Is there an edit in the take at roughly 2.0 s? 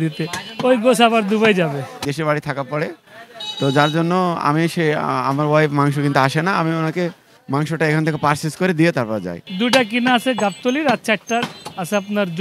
yes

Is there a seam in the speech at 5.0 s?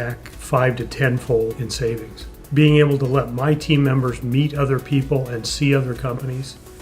no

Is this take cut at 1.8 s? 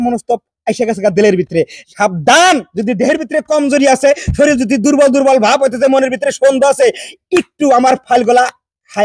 yes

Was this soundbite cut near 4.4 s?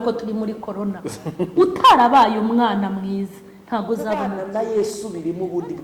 yes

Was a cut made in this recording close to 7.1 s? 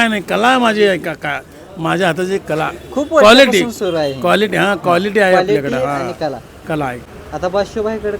yes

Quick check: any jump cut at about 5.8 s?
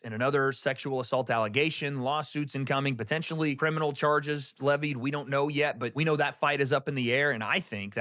no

